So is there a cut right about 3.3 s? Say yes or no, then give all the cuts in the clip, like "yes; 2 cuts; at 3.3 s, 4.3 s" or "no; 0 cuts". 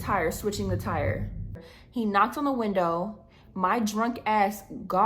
no; 1 cut; at 1.7 s